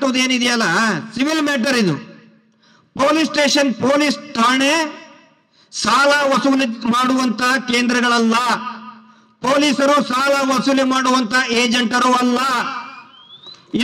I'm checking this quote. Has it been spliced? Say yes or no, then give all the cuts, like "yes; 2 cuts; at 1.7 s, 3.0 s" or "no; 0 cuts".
no; 0 cuts